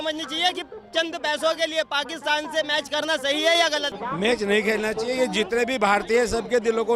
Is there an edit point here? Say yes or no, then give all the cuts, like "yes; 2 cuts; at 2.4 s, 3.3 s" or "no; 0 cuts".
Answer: yes; 1 cut; at 3.9 s